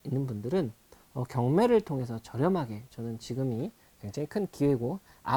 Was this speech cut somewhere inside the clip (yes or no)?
no